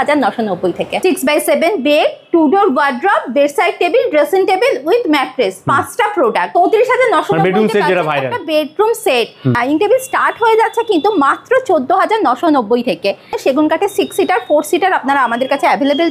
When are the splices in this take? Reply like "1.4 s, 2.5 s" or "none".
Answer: 1.0 s, 6.5 s, 9.5 s, 13.3 s